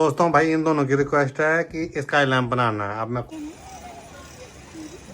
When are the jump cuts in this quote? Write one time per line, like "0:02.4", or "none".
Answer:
0:03.2